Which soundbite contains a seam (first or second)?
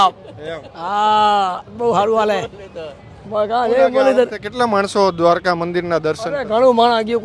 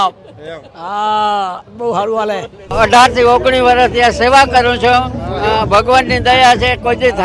second